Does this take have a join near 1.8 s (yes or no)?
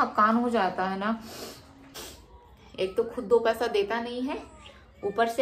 yes